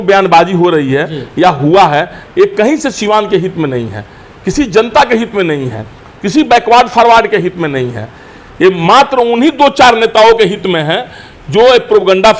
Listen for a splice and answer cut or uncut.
uncut